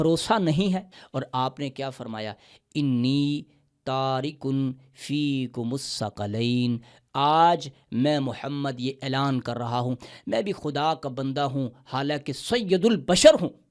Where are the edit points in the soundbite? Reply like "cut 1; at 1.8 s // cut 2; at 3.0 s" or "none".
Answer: cut 1; at 1.0 s